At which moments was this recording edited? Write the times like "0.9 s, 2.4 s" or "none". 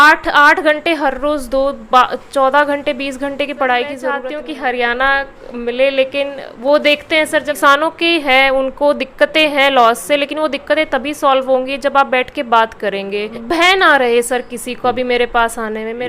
4.3 s, 7.5 s, 13.3 s

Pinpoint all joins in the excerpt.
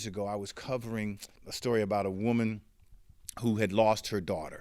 1.4 s

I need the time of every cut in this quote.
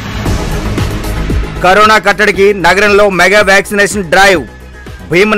none

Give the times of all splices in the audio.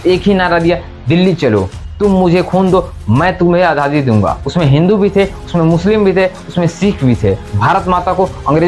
1.8 s, 4.4 s, 7.5 s

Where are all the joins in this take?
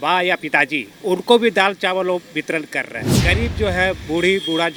none

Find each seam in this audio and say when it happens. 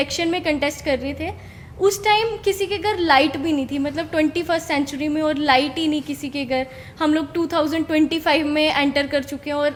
none

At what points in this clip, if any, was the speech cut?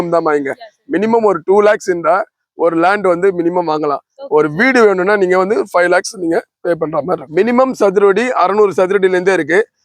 7.2 s

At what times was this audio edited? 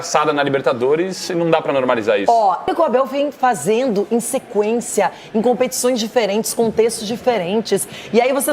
2.7 s

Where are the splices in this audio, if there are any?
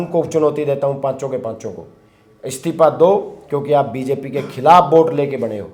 none

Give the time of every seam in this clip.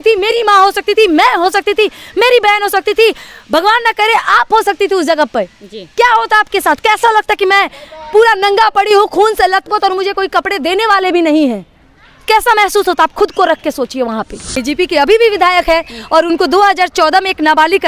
14.4 s

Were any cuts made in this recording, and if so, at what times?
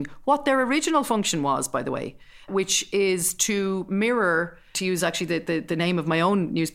2.5 s, 4.7 s

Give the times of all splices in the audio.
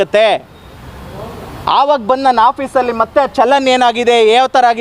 none

